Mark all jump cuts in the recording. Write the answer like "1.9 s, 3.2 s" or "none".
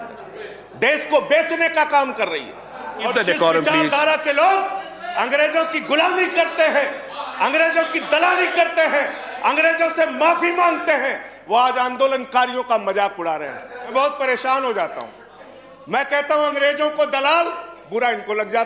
3.0 s, 13.9 s